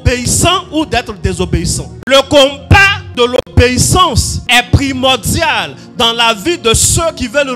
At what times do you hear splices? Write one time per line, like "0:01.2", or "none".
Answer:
0:01.9
0:03.0
0:04.3